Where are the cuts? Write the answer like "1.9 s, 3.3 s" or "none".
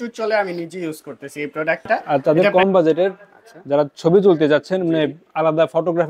2.0 s